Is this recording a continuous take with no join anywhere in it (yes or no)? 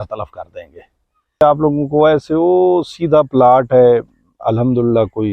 no